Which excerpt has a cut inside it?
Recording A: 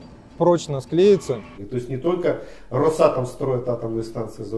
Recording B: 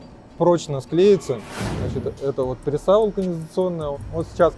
A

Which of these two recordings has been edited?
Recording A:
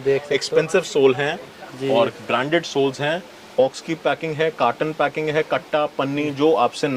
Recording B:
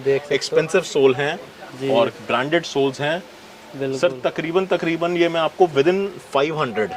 A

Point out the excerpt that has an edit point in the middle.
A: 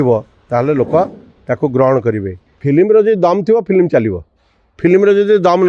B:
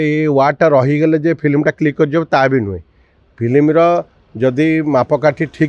A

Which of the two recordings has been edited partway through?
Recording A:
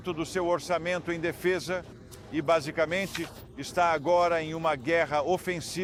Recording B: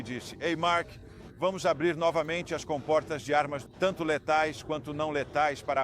B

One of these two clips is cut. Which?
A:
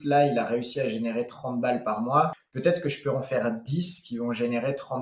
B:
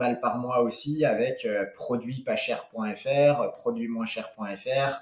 A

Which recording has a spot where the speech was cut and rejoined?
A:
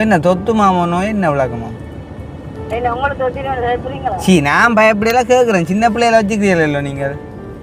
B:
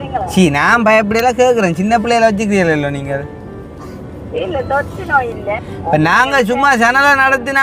B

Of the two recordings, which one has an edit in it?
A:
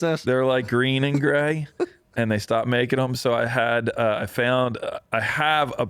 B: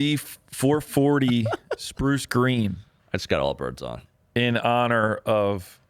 B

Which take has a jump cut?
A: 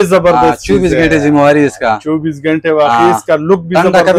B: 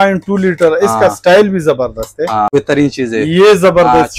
B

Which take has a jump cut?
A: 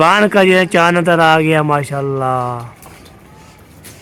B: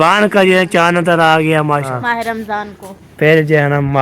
B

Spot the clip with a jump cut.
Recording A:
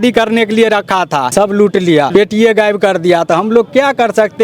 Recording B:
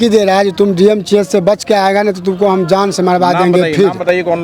A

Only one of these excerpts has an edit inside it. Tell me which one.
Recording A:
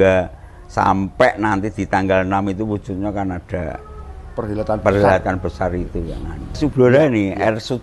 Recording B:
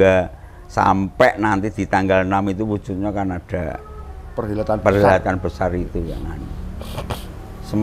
A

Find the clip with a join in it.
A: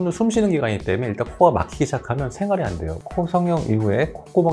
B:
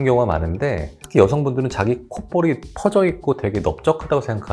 A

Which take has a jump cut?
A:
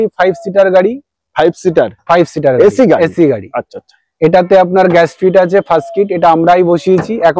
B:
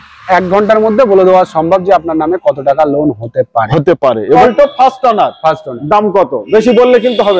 B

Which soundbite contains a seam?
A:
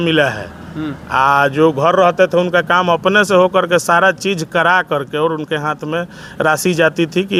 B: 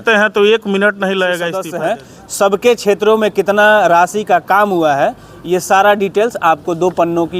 B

